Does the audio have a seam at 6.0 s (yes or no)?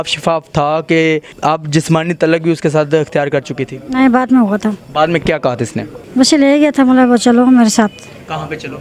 yes